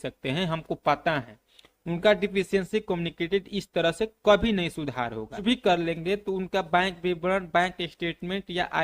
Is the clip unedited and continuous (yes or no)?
yes